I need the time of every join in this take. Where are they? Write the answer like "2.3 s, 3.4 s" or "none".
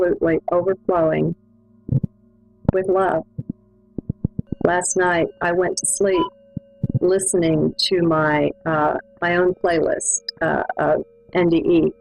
none

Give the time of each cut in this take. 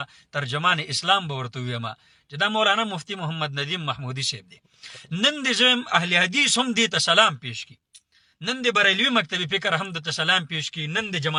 none

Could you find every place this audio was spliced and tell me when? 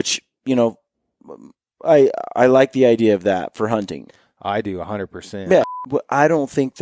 5.6 s

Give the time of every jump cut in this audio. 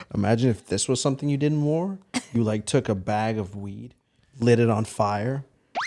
none

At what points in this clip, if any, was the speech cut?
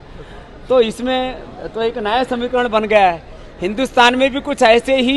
none

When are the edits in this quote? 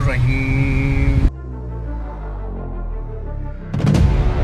none

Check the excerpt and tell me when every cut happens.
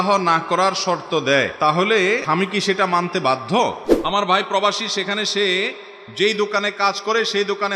1.5 s, 2.2 s, 3.9 s

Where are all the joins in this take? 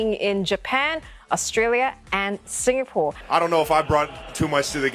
3.2 s

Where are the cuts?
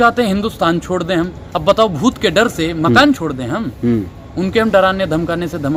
none

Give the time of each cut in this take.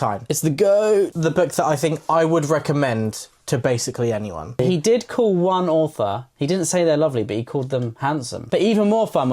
1.1 s, 4.6 s, 8.4 s

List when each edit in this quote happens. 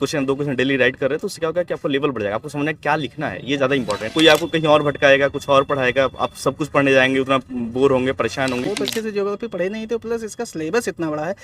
4.0 s, 8.6 s

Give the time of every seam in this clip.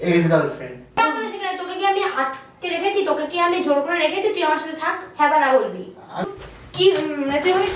1.0 s, 6.3 s

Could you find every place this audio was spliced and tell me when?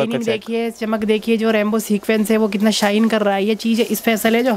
none

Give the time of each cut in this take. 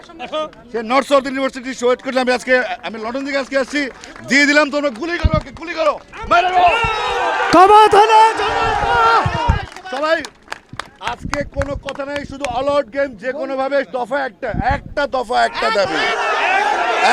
none

